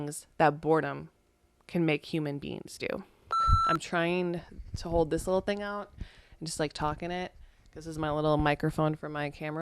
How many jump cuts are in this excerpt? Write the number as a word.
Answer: one